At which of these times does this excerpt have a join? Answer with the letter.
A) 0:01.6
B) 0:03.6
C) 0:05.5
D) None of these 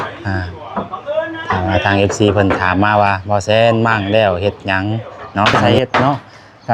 C